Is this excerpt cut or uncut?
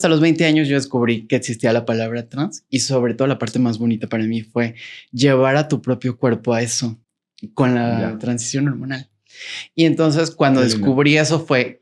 uncut